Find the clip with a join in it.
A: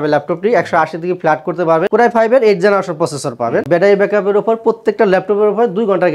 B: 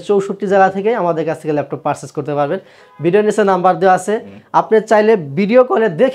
A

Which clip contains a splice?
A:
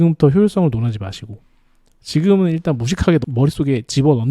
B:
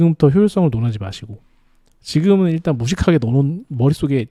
A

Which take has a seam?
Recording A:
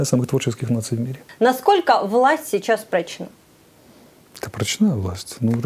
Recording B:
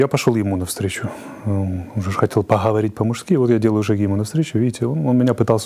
A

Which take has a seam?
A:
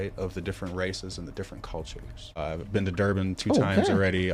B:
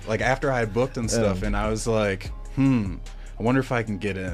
A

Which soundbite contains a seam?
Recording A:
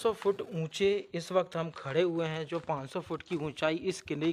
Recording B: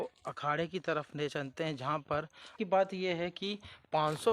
B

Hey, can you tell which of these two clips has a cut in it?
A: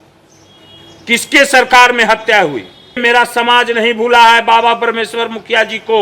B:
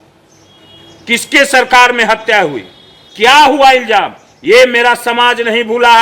A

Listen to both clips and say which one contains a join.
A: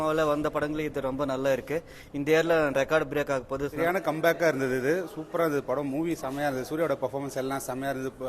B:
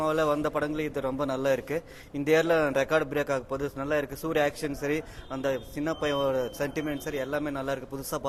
A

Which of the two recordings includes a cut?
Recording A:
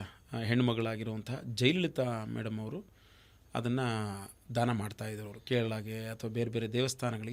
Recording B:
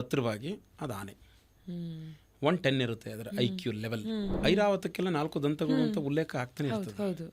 B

